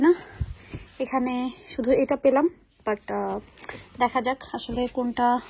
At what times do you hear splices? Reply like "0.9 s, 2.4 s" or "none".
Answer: none